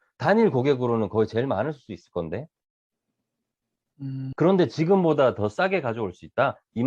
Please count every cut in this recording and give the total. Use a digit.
1